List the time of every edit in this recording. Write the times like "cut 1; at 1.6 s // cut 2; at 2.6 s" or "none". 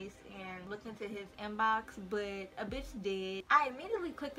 cut 1; at 3.4 s